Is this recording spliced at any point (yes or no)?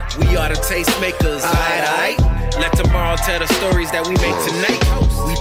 no